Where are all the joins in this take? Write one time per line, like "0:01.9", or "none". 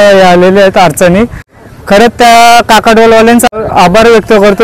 0:01.4
0:03.5